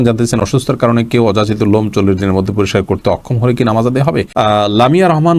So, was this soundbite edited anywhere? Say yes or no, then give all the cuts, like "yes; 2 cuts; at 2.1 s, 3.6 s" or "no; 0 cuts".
yes; 1 cut; at 4.3 s